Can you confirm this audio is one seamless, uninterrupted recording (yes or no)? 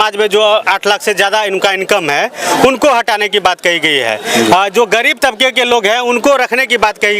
yes